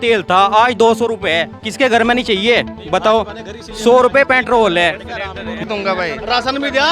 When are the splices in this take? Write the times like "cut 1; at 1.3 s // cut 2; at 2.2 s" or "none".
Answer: cut 1; at 5.5 s